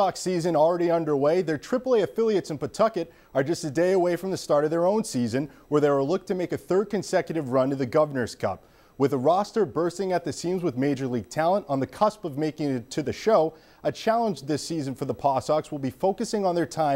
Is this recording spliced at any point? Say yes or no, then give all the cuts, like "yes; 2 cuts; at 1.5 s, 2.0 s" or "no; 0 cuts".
no; 0 cuts